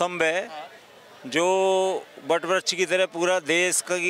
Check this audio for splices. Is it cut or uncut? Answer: uncut